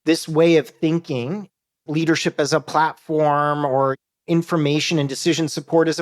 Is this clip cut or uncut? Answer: cut